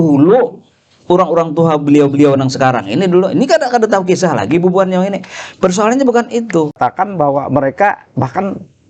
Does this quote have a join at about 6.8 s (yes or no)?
yes